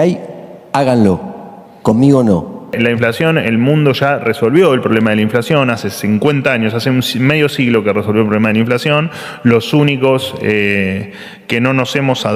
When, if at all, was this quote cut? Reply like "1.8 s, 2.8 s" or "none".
2.7 s